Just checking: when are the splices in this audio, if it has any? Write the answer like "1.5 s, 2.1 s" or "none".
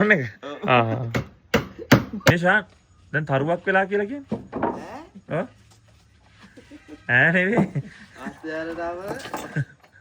2.3 s